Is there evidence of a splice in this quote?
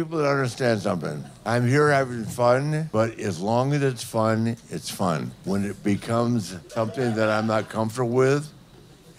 yes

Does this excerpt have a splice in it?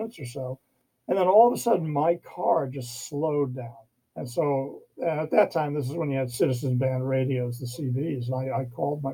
no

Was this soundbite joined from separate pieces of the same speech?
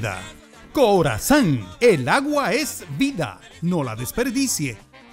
no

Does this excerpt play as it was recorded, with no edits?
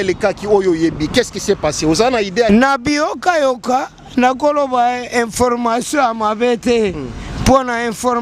no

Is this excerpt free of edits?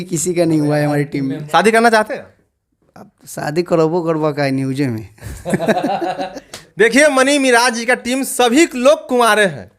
no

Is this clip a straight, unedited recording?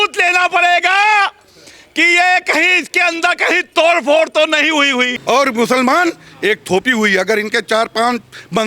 no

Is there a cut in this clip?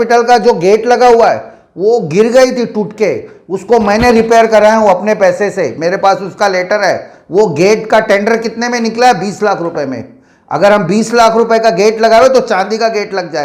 no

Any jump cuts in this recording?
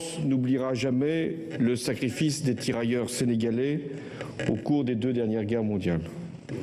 yes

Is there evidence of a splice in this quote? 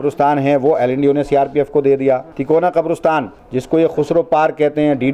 yes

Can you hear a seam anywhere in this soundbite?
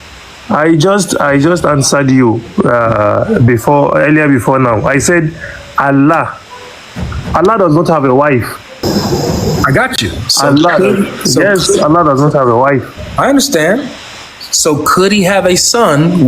yes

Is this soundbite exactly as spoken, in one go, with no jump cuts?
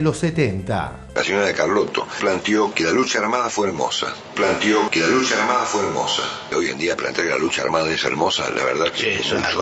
no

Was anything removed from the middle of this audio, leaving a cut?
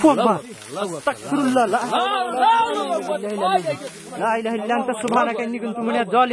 no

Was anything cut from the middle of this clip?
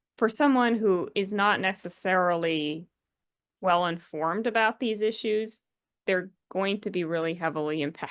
no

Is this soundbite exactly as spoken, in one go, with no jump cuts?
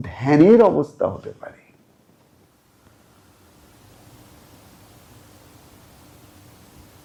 yes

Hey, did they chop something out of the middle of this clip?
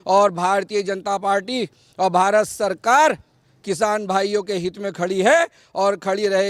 no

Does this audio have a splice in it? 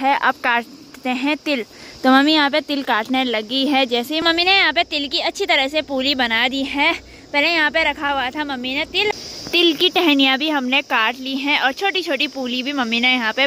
yes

